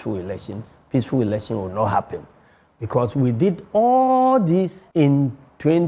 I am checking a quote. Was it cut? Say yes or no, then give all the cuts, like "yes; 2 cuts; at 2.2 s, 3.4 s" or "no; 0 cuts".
yes; 1 cut; at 4.8 s